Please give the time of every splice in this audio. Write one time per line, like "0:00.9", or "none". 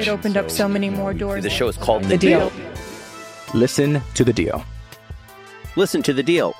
none